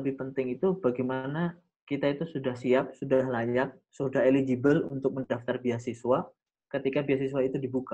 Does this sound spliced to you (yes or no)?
no